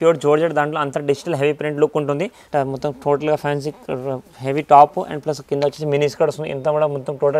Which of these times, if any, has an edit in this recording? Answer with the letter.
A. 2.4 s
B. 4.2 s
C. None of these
A